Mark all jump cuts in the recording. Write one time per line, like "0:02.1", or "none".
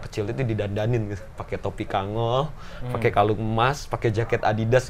none

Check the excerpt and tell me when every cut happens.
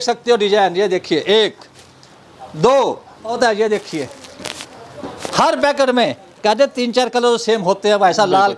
0:03.4

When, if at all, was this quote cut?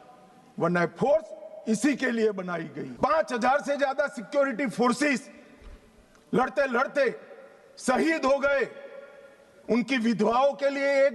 0:02.8

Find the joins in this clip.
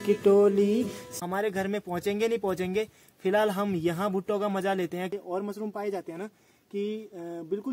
0:01.0
0:05.1

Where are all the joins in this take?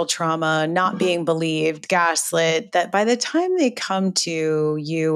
none

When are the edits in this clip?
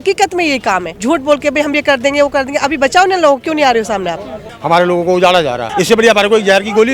0:00.9
0:04.5
0:05.7

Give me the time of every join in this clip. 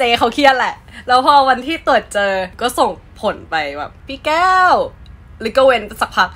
0:02.5
0:04.0

